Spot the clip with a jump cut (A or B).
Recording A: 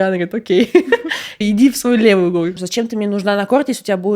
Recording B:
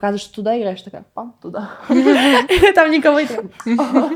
A